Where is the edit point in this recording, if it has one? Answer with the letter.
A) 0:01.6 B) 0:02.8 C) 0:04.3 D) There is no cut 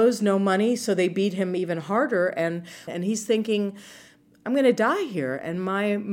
B